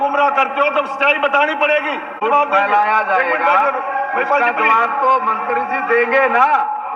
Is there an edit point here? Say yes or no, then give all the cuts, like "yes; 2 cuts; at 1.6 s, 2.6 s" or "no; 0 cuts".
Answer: yes; 1 cut; at 2.2 s